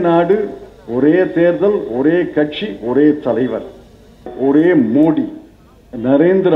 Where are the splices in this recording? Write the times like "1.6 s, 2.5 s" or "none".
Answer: 4.3 s